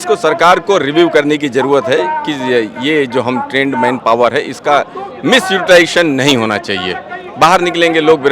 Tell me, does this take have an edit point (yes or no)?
no